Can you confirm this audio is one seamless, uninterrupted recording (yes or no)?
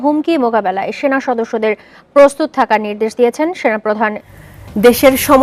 yes